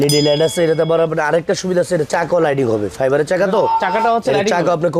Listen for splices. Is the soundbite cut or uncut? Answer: uncut